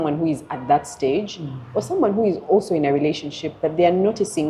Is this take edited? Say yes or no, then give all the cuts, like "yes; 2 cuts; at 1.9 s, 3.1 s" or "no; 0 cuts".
no; 0 cuts